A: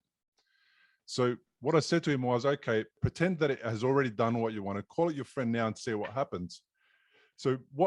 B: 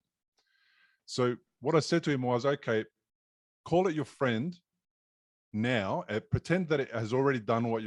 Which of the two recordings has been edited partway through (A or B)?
A